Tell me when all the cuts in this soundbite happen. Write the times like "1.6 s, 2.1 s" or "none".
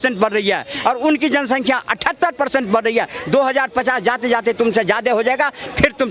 none

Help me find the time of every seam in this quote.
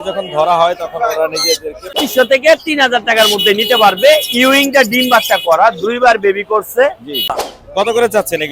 2.0 s, 7.4 s

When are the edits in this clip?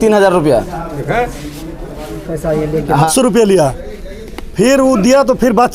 3.1 s

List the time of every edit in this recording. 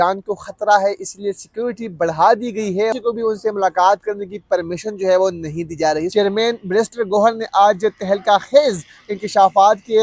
2.9 s, 6.0 s

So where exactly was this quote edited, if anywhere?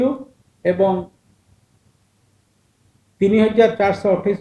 none

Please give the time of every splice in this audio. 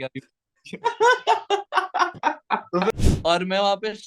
2.9 s

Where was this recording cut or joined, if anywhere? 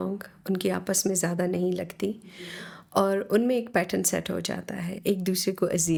none

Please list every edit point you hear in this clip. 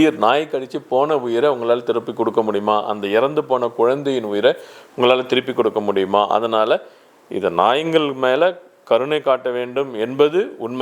none

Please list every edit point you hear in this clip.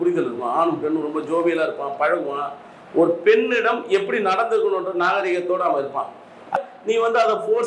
6.6 s

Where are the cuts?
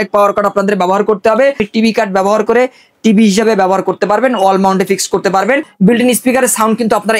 1.6 s, 5.7 s

